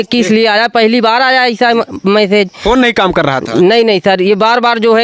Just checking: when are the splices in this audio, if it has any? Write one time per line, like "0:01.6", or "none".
none